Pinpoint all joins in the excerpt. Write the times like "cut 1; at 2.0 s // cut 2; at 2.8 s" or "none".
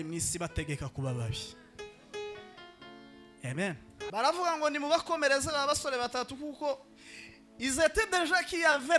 cut 1; at 4.1 s